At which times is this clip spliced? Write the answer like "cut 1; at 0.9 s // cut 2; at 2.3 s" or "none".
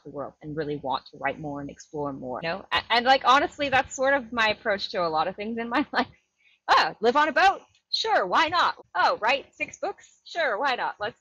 cut 1; at 2.4 s // cut 2; at 8.8 s